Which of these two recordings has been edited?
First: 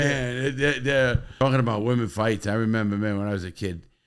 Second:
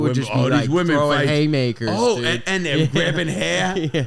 first; 1 cut; at 1.3 s

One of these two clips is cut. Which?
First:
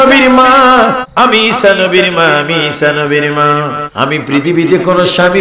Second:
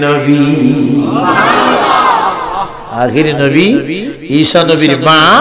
first; 2 cuts; at 1.0 s, 3.8 s

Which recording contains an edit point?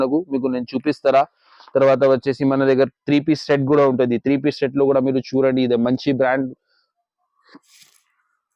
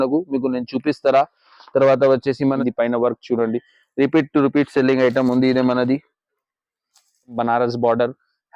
second; 2 cuts; at 2.6 s, 7.4 s

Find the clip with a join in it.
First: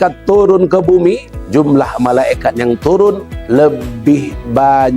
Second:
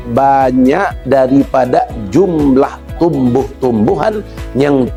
first; 2 cuts; at 1.3 s, 3.3 s

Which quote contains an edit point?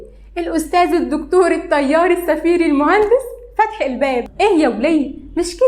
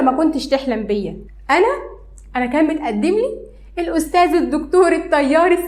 first; 1 cut; at 4.3 s

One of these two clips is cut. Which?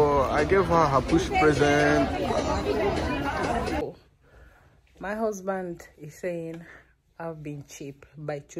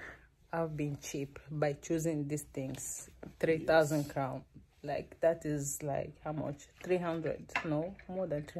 first; 1 cut; at 3.8 s

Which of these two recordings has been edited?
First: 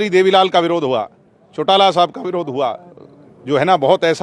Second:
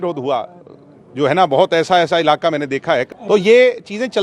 second; 1 cut; at 3.1 s

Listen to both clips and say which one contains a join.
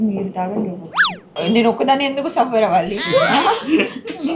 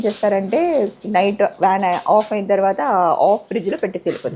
first; 1 cut; at 1.3 s

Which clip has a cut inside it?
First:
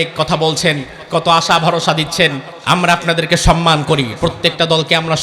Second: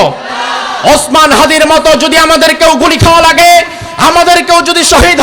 first; 1 cut; at 2.5 s

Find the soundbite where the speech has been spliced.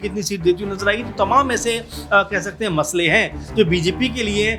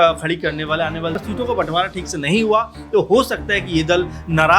second; 1 cut; at 1.2 s

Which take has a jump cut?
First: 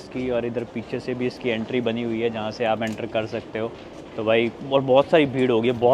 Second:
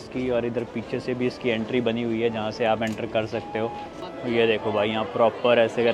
second; 1 cut; at 4.0 s

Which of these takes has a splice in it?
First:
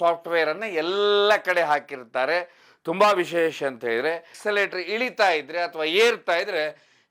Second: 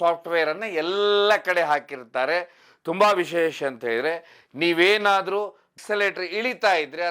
first; 1 cut; at 4.3 s

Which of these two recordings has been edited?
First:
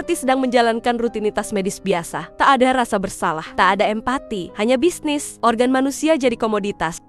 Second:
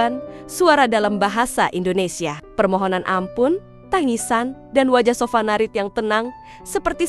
first; 4 cuts; at 2.2 s, 3.4 s, 4.4 s, 5.3 s

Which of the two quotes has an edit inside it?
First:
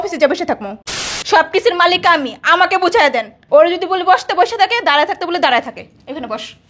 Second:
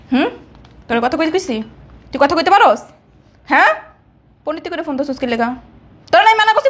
first; 1 cut; at 1.1 s

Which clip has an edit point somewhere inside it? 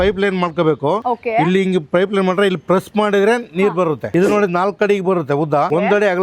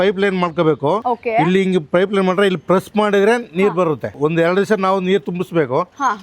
first; 1 cut; at 4.1 s

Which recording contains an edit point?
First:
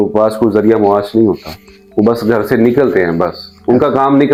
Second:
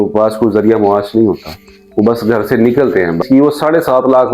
second; 1 cut; at 3.2 s

